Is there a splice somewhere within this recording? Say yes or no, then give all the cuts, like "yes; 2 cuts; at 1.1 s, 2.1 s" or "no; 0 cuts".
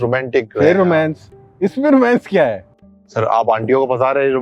no; 0 cuts